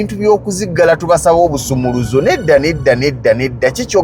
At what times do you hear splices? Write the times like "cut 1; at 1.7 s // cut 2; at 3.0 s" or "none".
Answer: none